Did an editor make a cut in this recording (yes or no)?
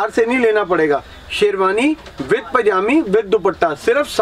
no